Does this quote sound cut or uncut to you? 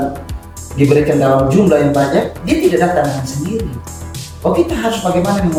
uncut